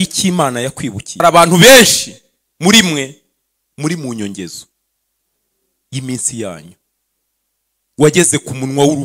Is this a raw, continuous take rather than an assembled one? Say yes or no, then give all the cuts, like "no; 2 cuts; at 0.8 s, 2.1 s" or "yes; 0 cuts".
no; 1 cut; at 1.2 s